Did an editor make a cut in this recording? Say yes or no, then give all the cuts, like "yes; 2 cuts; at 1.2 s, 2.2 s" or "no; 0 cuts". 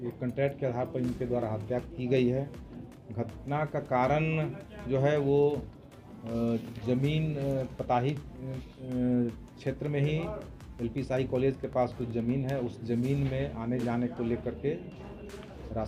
no; 0 cuts